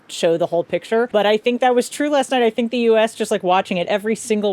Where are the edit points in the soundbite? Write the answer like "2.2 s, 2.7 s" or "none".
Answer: 1.1 s

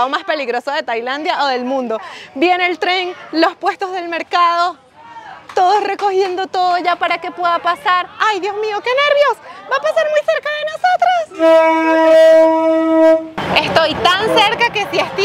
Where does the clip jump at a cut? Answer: 13.4 s

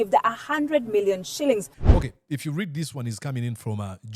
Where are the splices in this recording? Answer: 1.8 s

